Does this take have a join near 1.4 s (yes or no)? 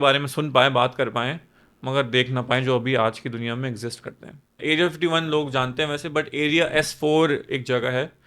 no